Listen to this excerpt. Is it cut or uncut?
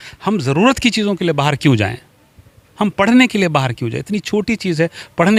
uncut